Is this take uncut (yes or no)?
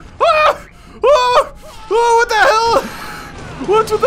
yes